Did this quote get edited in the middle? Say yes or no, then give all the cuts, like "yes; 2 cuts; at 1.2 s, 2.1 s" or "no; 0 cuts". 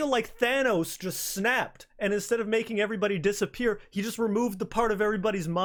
no; 0 cuts